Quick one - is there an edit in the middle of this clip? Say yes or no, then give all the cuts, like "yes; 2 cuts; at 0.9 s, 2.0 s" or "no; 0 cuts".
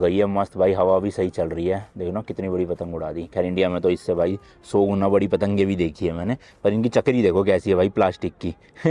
no; 0 cuts